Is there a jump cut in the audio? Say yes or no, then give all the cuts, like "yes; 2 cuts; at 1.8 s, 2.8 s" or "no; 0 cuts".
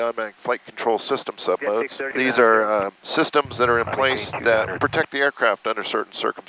yes; 2 cuts; at 2.1 s, 4.7 s